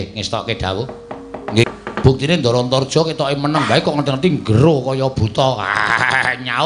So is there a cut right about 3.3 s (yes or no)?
no